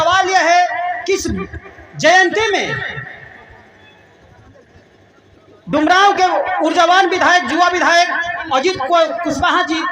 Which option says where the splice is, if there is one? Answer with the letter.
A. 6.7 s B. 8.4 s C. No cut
B